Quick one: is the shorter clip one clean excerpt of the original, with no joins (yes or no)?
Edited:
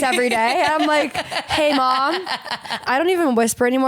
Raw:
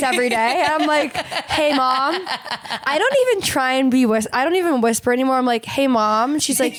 no